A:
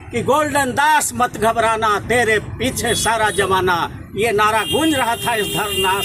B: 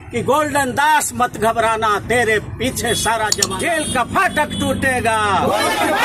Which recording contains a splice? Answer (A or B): B